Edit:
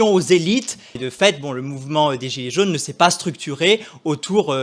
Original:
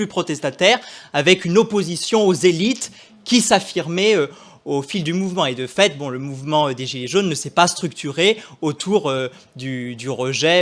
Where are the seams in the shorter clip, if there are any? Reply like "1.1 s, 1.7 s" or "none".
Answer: 1.0 s